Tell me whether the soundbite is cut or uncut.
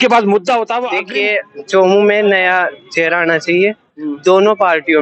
cut